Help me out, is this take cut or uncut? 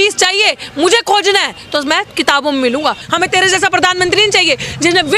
cut